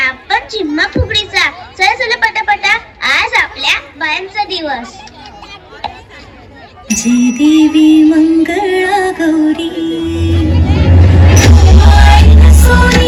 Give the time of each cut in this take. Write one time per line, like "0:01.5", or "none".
none